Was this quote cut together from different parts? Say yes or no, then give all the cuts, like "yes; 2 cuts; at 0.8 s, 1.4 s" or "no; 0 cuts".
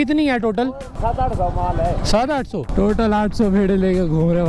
yes; 2 cuts; at 0.9 s, 2.6 s